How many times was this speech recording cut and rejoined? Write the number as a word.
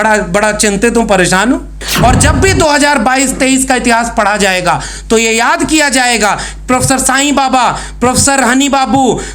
one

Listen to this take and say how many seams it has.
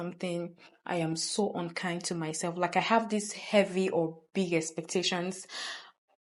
zero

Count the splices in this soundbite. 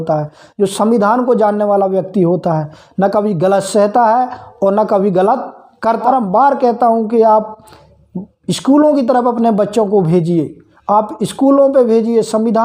one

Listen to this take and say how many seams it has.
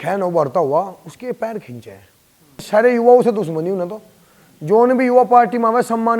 one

